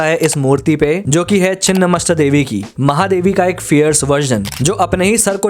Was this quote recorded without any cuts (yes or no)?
yes